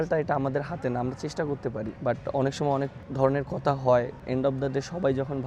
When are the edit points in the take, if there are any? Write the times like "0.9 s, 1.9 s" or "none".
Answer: 1.9 s, 3.0 s, 4.2 s